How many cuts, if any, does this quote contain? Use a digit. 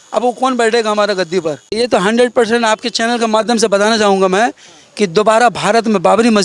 1